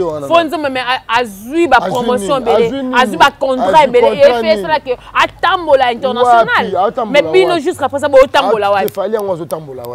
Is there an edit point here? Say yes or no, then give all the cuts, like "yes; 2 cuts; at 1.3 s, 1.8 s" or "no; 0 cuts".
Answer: no; 0 cuts